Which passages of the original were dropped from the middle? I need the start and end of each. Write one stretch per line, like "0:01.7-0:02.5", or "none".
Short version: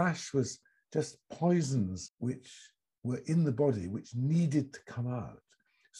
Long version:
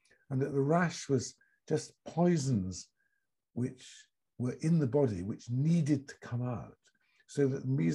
0:02.8-0:03.4